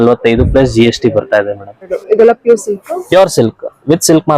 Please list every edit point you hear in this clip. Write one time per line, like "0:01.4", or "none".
0:02.0